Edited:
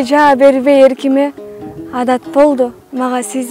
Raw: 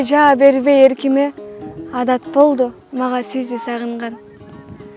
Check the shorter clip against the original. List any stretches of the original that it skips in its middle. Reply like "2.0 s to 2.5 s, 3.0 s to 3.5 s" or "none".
none